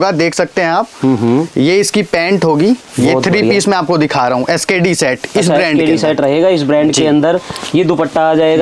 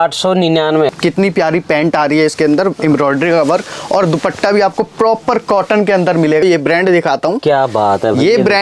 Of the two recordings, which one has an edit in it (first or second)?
second